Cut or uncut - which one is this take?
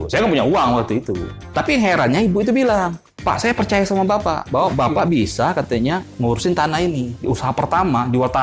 cut